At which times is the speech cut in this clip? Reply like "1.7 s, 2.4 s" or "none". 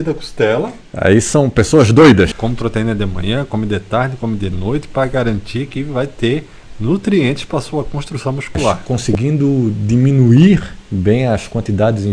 2.4 s, 8.8 s